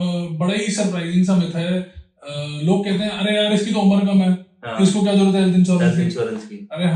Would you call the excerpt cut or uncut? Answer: uncut